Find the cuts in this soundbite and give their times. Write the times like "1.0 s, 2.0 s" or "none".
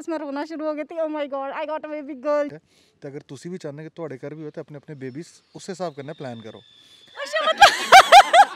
2.5 s